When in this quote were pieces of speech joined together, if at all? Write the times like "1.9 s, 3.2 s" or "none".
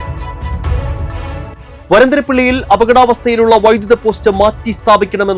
none